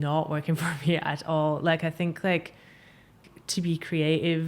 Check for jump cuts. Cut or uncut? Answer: cut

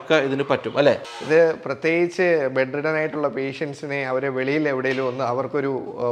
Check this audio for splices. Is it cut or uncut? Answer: cut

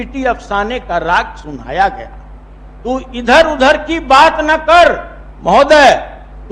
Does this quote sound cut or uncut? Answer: uncut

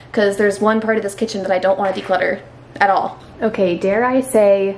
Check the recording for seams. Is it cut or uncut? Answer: cut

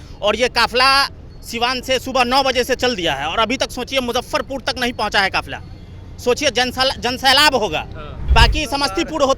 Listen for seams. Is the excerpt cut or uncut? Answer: cut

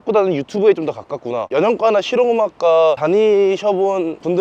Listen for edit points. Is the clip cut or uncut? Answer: cut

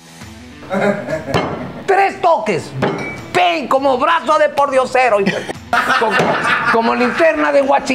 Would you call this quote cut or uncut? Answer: uncut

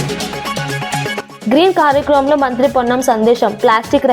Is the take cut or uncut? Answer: cut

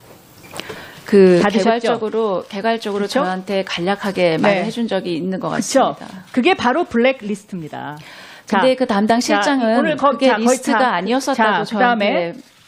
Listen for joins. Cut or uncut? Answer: cut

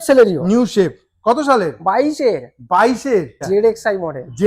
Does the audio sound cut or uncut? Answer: cut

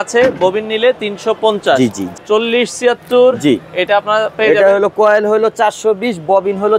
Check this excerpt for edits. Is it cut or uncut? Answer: cut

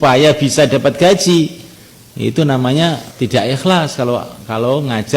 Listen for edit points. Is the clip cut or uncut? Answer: cut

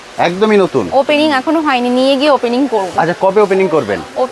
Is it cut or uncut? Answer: uncut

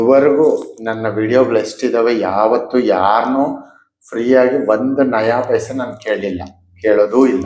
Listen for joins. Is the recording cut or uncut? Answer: uncut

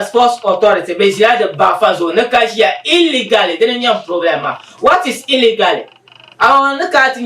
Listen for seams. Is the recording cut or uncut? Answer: uncut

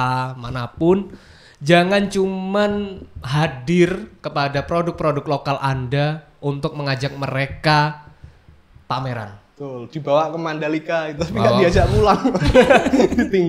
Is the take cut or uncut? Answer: uncut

